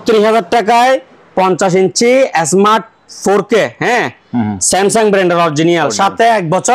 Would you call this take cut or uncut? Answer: uncut